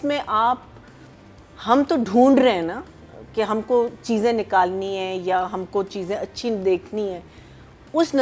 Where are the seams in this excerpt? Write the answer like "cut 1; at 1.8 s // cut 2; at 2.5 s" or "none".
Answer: none